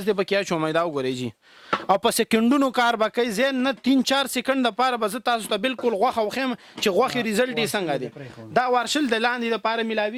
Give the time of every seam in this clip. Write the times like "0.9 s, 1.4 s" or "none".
none